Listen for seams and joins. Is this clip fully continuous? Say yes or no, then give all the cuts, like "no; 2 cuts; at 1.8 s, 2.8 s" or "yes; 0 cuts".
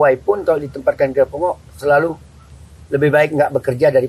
yes; 0 cuts